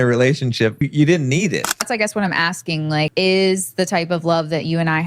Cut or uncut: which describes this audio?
cut